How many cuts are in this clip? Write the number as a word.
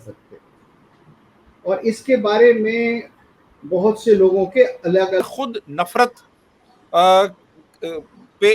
one